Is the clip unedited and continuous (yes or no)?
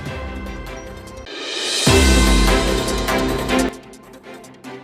no